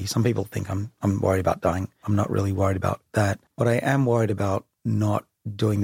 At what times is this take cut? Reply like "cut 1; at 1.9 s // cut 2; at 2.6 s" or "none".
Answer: cut 1; at 2.0 s // cut 2; at 3.4 s